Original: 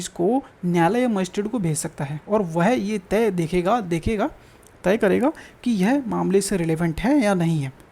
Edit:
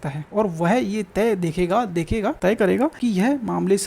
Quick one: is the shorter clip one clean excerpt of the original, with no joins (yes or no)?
no